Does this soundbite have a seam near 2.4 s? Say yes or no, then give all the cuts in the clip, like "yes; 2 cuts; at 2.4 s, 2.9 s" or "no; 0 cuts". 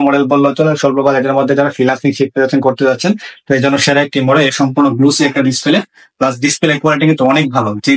no; 1 cut; at 4.5 s